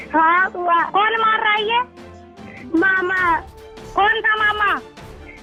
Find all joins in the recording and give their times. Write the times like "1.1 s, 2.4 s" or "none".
none